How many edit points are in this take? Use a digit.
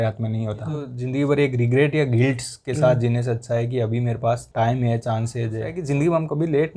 2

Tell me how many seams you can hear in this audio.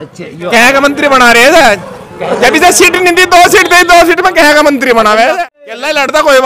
1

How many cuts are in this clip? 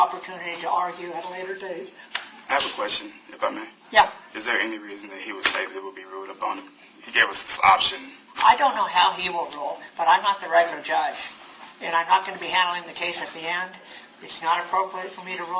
0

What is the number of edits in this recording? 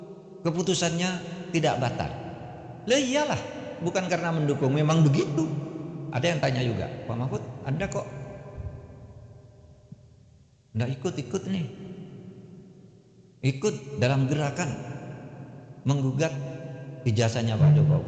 1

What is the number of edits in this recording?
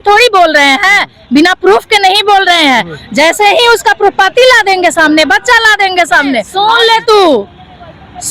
1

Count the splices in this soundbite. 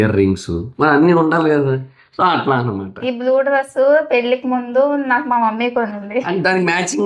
0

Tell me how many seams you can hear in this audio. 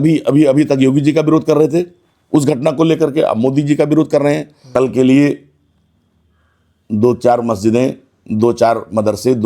1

